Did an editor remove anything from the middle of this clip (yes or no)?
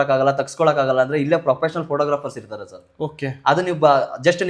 no